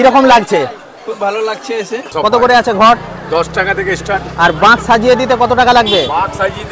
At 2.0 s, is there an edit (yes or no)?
yes